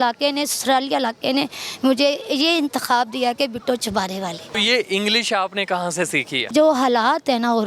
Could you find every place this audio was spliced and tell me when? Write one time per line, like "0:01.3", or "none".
0:04.5
0:06.5